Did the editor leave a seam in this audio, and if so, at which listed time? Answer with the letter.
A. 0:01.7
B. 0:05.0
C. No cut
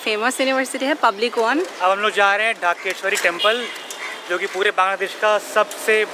A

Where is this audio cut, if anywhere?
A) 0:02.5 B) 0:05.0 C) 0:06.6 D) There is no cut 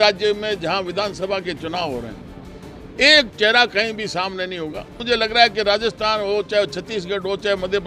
B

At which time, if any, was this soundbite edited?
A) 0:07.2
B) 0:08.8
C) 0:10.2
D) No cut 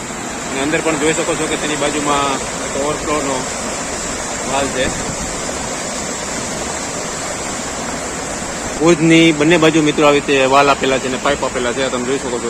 B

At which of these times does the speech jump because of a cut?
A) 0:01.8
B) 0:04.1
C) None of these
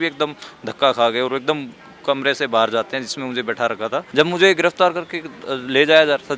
B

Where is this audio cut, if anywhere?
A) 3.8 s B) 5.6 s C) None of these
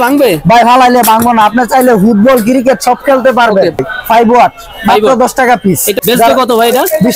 C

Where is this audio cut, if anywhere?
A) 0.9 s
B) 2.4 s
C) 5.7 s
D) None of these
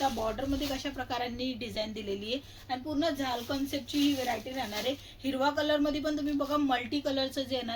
D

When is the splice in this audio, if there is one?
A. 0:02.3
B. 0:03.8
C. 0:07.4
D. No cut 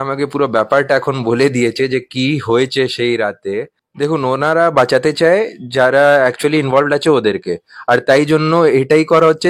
B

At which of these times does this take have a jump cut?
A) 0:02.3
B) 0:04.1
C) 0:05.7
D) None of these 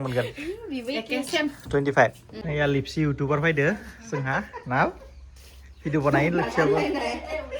A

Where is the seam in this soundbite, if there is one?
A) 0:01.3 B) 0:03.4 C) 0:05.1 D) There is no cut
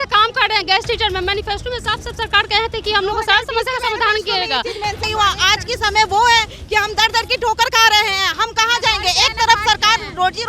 C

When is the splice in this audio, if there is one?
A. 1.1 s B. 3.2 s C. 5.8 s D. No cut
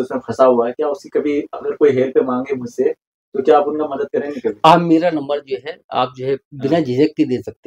D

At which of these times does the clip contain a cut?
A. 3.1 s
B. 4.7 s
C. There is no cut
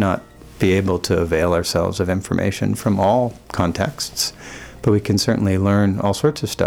C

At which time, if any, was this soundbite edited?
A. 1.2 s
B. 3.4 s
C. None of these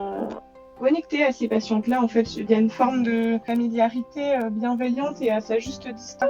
B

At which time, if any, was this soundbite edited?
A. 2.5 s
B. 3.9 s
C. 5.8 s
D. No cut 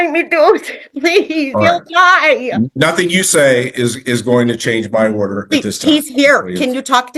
D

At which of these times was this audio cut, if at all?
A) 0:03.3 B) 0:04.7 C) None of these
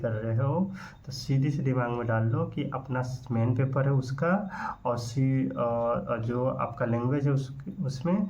C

